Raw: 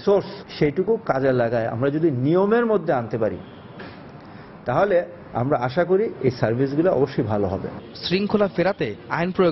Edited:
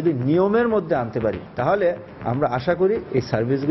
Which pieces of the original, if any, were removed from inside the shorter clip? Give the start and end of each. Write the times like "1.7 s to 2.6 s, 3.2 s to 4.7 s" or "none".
3.4 s to 4.5 s